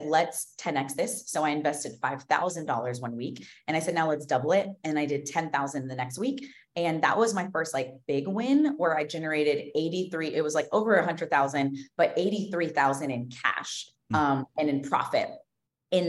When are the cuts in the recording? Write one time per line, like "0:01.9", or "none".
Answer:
none